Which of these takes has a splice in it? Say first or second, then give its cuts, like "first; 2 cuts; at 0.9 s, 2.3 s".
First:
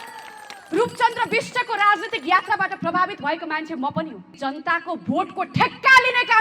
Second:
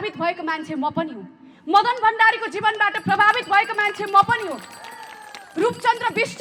first; 1 cut; at 4.3 s